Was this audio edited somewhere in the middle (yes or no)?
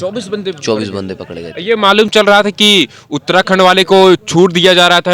no